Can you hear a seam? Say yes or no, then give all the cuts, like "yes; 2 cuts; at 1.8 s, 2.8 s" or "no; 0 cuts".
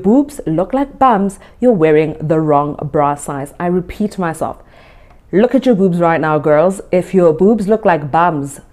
no; 0 cuts